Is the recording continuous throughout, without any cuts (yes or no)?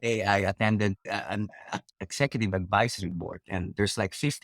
no